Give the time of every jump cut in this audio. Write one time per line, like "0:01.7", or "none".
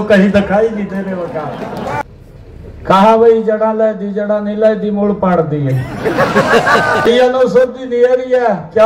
0:02.0
0:07.1